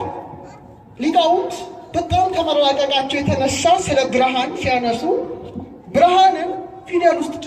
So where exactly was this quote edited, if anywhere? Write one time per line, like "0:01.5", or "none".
none